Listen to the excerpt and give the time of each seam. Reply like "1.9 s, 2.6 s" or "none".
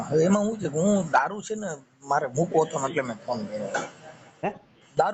none